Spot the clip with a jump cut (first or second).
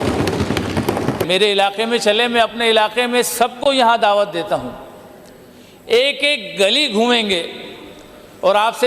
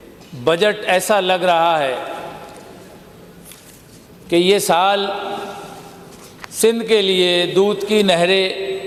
first